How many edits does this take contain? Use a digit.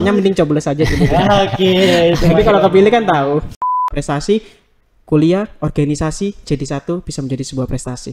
1